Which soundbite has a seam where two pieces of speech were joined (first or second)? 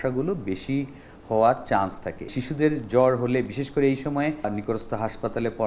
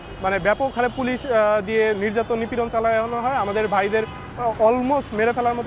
first